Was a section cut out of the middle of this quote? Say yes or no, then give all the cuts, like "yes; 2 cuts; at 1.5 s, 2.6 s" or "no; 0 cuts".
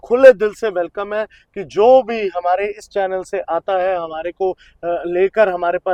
no; 0 cuts